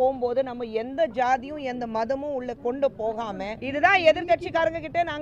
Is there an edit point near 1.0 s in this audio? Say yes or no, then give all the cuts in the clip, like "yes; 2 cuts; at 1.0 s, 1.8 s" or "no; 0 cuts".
no; 1 cut; at 3.6 s